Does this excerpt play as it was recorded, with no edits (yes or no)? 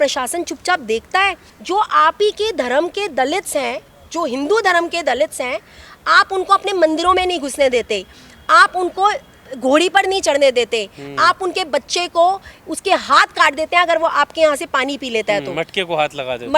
no